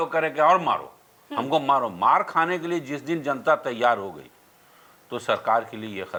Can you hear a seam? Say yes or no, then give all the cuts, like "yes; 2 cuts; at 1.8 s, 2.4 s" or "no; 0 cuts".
no; 0 cuts